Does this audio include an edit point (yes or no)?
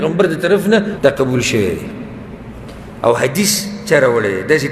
yes